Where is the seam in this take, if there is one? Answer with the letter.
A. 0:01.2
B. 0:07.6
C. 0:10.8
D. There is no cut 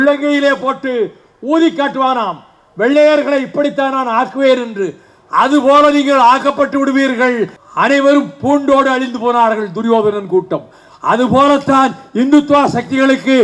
B